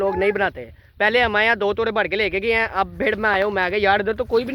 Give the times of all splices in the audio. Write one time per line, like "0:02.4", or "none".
none